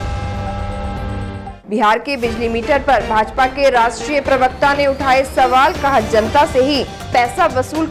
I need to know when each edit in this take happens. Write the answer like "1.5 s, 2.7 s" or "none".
none